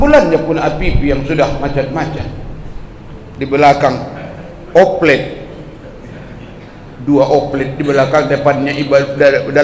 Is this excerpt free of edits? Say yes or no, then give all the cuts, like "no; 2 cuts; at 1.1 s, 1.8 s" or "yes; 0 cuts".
yes; 0 cuts